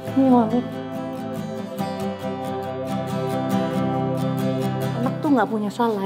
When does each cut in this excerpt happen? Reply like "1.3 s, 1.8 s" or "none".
none

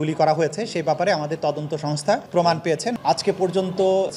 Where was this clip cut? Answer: 3.0 s

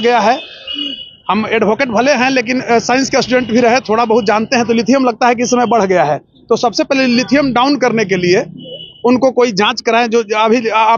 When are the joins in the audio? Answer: none

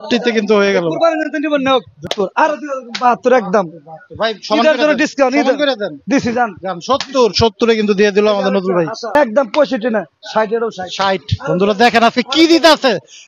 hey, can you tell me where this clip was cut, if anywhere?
2.1 s, 9.2 s

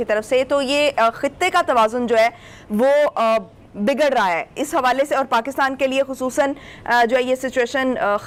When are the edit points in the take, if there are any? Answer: none

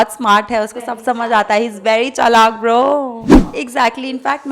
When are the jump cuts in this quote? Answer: 3.3 s

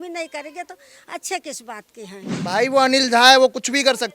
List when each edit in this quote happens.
2.3 s

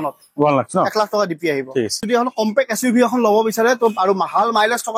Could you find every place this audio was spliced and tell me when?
2.0 s

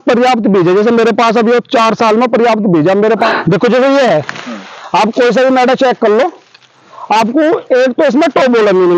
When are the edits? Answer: 3.3 s

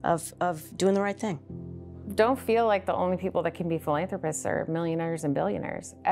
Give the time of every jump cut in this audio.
1.8 s

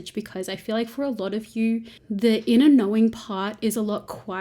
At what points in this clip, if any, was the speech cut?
2.0 s

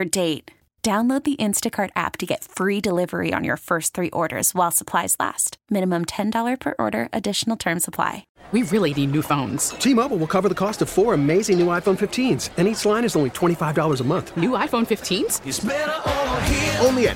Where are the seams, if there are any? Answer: 8.3 s

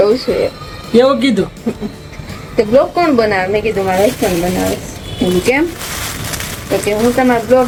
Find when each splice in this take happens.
none

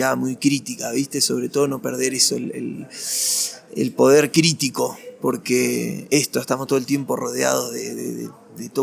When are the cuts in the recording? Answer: none

